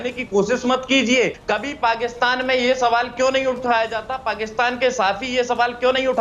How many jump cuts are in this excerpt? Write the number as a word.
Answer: one